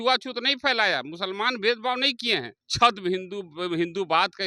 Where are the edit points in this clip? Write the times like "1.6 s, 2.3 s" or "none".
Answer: 2.6 s